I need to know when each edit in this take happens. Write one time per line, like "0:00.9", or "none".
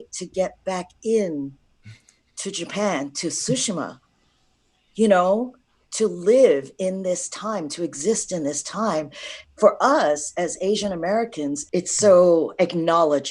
0:11.6